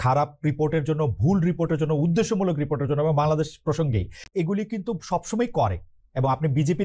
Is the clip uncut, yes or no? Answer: yes